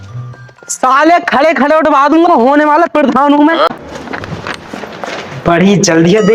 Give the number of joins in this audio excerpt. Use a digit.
1